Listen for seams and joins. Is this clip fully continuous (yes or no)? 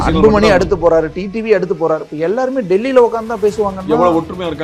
yes